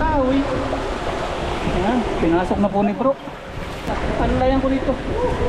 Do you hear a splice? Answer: yes; 1 cut; at 3.9 s

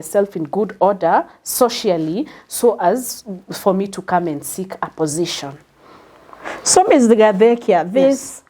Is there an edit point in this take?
no; 0 cuts

